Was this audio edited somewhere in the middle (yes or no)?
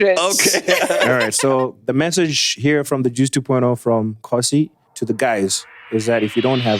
yes